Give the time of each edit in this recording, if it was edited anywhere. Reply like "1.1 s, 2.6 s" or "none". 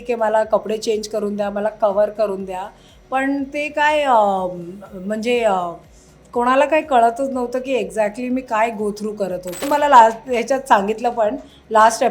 9.7 s